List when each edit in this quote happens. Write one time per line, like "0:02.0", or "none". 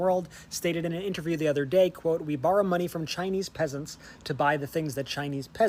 none